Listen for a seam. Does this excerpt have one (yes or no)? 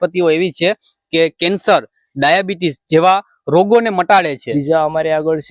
yes